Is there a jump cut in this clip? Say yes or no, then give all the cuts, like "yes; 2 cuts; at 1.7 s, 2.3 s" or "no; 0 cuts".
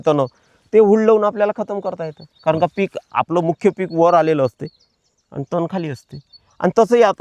no; 0 cuts